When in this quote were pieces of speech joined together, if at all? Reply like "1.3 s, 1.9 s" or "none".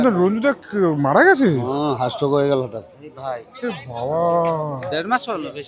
none